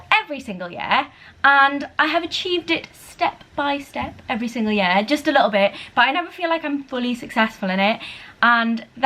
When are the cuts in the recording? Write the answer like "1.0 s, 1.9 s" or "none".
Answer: none